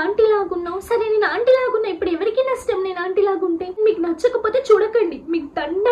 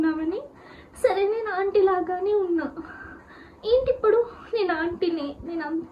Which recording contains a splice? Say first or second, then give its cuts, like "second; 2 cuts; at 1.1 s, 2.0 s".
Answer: first; 1 cut; at 3.7 s